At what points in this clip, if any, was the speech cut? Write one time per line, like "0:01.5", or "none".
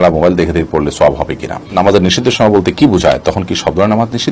0:01.7